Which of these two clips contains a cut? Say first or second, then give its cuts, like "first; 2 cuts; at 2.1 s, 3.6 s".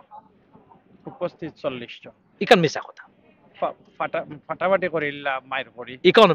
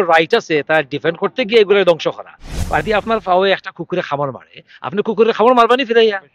second; 1 cut; at 2.8 s